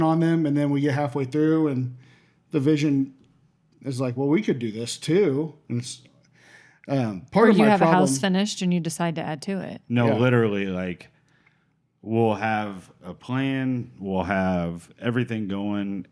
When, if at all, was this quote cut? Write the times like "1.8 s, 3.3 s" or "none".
none